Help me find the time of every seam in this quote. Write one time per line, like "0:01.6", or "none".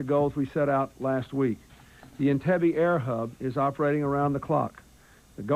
0:02.4